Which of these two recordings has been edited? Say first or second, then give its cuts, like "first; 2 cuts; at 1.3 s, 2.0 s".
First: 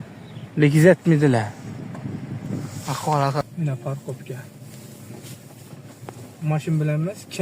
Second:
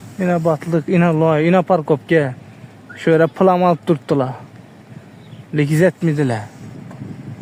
first; 1 cut; at 3.4 s